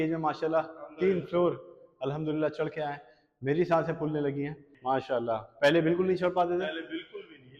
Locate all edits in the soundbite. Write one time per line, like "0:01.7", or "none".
0:04.6